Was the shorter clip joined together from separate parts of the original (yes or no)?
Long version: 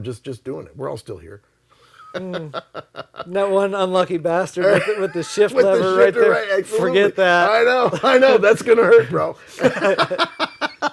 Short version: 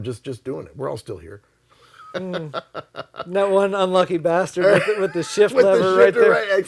no